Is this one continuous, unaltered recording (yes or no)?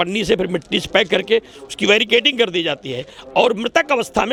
yes